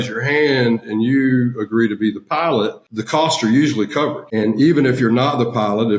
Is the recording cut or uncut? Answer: cut